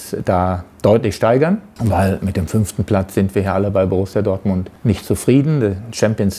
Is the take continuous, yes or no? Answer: no